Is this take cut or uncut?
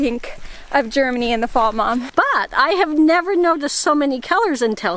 cut